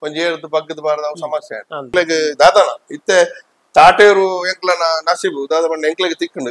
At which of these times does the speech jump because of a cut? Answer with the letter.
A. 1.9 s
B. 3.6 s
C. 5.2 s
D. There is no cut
A